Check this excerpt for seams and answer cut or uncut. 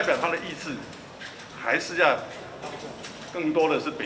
uncut